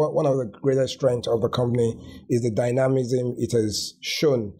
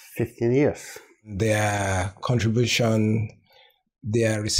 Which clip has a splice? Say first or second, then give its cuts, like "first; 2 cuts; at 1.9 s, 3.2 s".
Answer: second; 1 cut; at 1.3 s